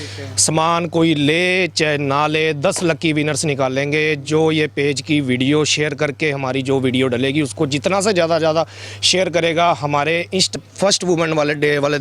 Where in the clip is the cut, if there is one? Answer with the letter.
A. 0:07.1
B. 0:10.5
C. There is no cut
B